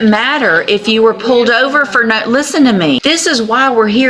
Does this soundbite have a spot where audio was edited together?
yes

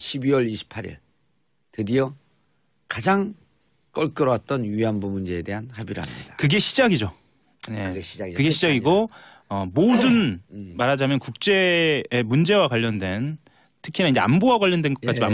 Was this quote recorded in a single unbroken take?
yes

